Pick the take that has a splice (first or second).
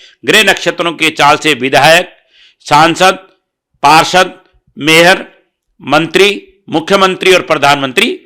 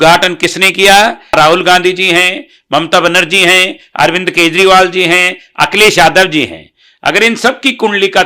second